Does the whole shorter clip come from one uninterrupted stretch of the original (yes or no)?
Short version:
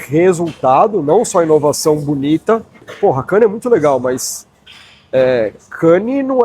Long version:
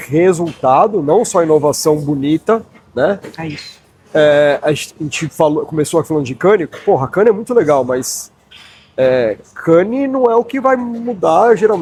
no